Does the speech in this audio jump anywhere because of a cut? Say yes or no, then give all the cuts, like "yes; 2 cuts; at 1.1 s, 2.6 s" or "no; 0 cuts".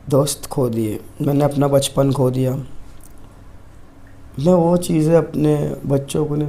no; 0 cuts